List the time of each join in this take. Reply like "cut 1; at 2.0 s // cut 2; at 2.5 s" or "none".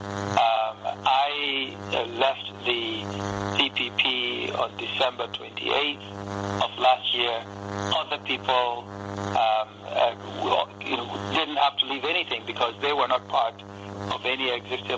cut 1; at 6.6 s